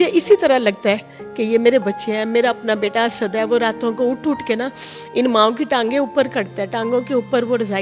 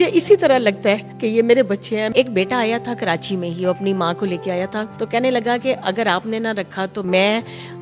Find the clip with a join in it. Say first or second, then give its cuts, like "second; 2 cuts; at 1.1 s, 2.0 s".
second; 4 cuts; at 1.1 s, 2.1 s, 4.9 s, 7.0 s